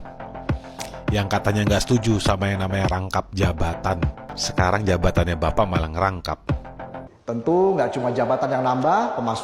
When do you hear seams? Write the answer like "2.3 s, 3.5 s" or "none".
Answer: 4.3 s, 6.9 s